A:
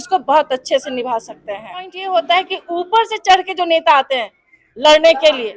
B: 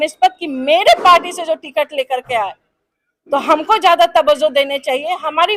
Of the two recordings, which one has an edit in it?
A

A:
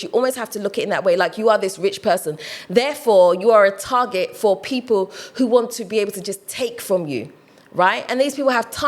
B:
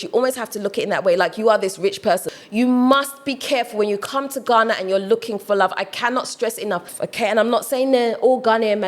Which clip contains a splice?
B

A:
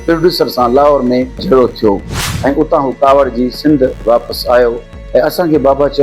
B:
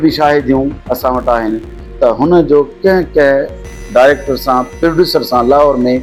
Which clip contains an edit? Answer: A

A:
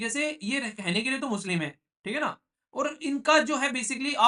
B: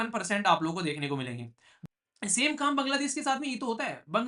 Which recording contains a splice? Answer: B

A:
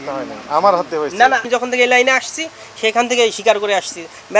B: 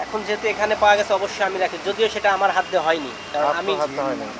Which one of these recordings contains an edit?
A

